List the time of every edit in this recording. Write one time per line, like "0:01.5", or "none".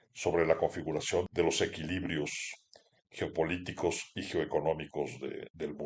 0:01.3